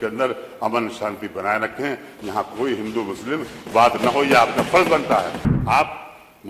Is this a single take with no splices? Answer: no; 1 cut; at 5.4 s

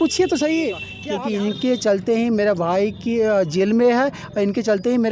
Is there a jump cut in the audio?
yes; 1 cut; at 0.9 s

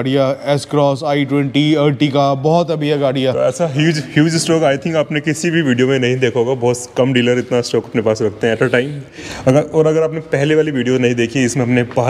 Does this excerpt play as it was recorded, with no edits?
yes; 0 cuts

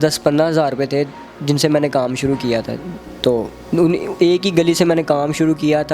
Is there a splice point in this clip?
no; 0 cuts

